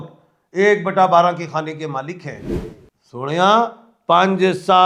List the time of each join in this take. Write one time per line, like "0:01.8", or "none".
none